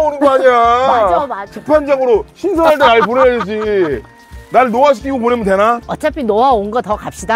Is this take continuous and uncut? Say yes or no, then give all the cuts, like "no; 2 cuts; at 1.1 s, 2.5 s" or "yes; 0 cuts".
yes; 0 cuts